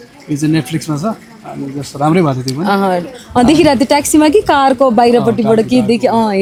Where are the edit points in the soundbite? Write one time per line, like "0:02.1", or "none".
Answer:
none